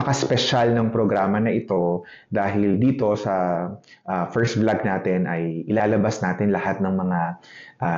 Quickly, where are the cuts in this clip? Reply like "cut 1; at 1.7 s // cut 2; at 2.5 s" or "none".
none